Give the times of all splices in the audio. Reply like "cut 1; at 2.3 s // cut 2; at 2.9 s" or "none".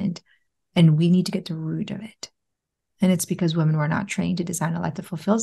none